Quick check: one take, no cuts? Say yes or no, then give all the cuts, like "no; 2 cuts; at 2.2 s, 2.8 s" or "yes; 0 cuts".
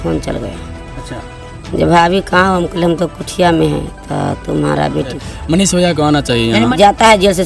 no; 2 cuts; at 5.2 s, 6.7 s